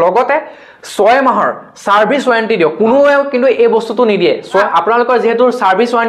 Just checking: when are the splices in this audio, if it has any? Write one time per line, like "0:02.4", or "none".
none